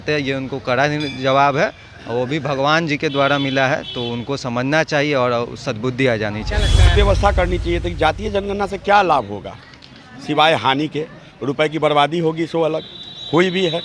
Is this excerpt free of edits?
no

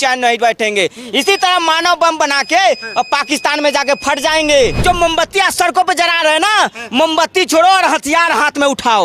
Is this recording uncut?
no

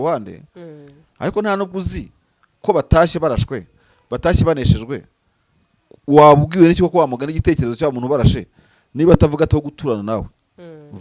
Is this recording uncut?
yes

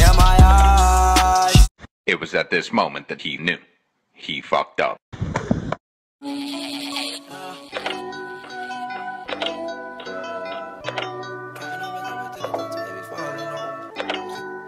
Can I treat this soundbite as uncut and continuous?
no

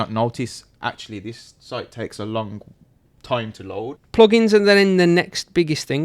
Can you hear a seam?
yes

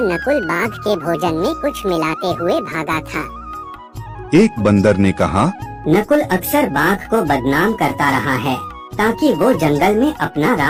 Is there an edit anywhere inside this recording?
no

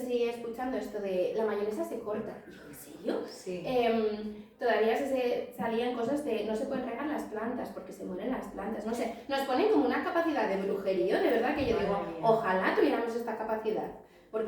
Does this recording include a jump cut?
no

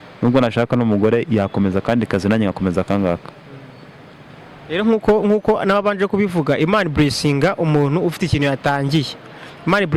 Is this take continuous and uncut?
yes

